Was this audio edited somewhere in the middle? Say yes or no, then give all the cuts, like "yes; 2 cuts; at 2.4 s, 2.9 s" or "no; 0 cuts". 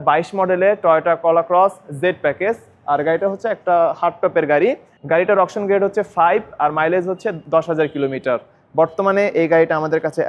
no; 0 cuts